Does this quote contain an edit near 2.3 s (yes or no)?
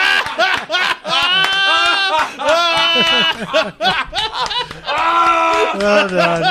no